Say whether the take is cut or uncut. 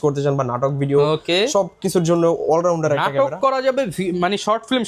uncut